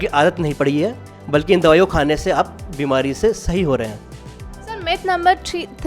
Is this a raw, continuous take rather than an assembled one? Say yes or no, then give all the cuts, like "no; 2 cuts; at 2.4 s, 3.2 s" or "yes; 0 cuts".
yes; 0 cuts